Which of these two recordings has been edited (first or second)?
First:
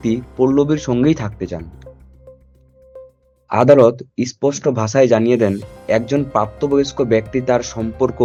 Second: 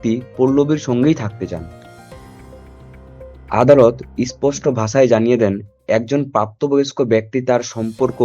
second